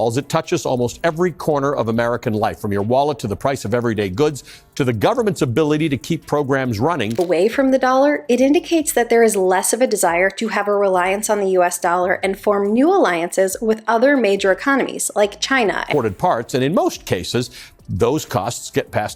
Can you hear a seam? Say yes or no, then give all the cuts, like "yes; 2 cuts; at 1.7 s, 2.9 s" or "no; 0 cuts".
yes; 2 cuts; at 7.1 s, 15.8 s